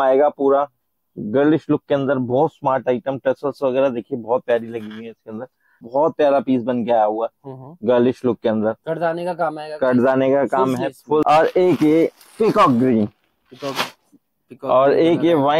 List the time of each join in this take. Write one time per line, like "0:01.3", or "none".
0:05.8
0:11.2